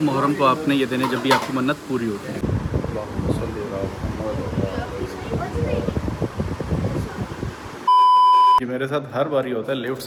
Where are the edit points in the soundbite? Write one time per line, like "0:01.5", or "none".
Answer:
none